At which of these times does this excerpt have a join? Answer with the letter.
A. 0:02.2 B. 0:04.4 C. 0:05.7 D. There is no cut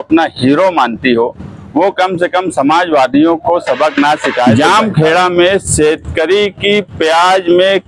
B